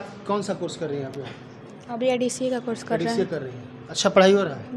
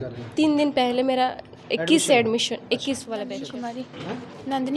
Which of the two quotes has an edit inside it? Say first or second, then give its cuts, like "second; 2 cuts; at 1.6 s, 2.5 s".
second; 1 cut; at 3.6 s